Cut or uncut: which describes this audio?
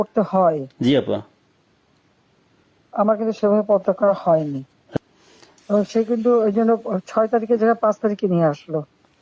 cut